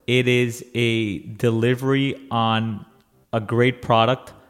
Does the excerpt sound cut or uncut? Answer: uncut